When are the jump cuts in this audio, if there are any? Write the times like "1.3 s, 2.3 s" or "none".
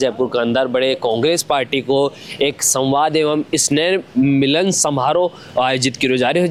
none